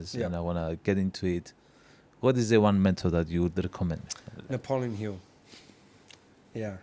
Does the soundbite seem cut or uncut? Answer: uncut